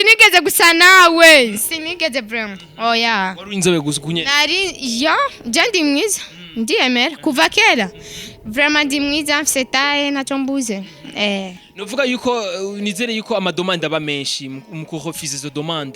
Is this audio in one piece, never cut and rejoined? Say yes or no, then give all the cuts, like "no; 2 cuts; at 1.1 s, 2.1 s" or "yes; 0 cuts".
yes; 0 cuts